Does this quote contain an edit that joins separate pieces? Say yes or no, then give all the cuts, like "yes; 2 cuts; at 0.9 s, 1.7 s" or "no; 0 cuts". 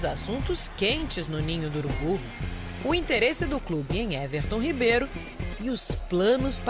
no; 0 cuts